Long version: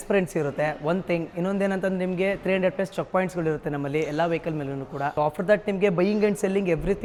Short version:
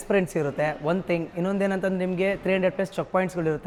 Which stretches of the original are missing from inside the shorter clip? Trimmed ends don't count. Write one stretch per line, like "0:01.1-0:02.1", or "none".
none